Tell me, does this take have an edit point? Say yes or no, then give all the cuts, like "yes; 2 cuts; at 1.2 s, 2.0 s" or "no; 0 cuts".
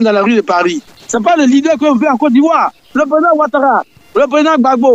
yes; 2 cuts; at 0.9 s, 2.8 s